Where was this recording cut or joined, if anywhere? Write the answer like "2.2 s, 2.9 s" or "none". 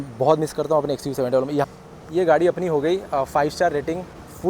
1.6 s